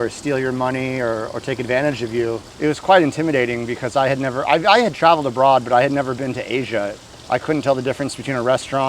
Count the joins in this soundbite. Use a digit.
2